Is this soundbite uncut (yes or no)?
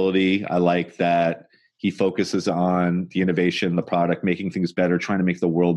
yes